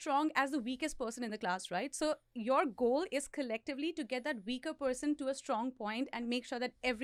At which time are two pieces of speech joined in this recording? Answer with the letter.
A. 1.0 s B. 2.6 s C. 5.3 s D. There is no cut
D